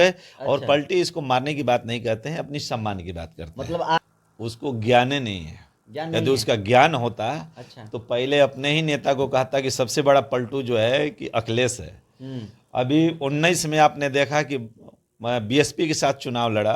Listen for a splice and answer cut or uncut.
cut